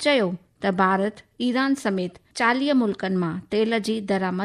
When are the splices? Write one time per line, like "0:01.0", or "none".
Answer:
0:02.2